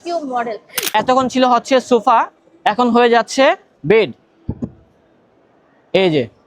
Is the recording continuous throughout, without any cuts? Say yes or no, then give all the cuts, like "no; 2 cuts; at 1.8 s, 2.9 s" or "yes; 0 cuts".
no; 1 cut; at 0.9 s